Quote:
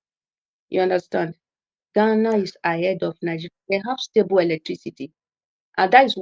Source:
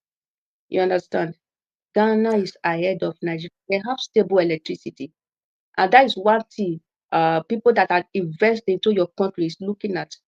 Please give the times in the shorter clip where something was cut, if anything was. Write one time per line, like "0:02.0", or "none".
none

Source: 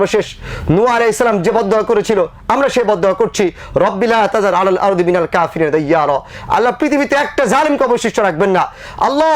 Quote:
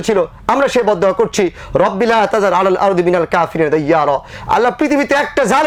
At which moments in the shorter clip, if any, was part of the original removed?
none

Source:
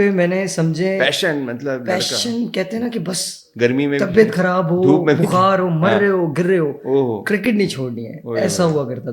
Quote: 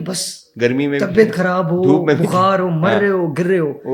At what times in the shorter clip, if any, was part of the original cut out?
none

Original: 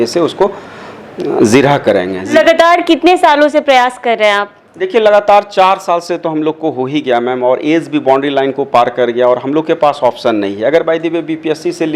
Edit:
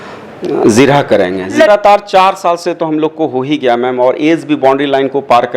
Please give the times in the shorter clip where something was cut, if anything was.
0:01.7

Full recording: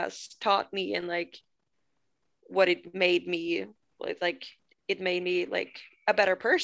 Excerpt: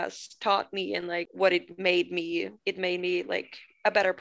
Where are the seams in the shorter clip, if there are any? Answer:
0:01.3
0:02.5

